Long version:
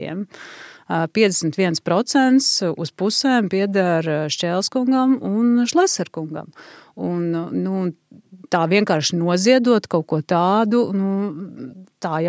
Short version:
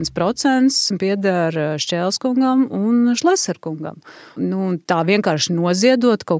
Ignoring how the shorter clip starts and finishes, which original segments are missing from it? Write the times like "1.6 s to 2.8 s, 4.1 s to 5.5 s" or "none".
2.6 s to 3.5 s, 6.9 s to 8.0 s